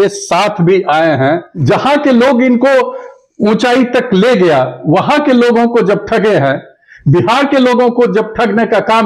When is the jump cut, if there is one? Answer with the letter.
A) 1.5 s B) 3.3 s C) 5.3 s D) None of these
A